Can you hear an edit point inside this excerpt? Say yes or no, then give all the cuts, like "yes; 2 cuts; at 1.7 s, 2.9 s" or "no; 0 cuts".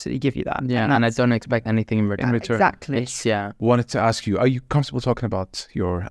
yes; 1 cut; at 3.5 s